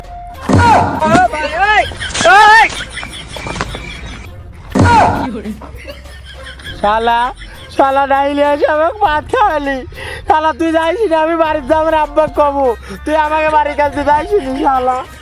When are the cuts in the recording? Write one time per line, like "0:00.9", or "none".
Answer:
none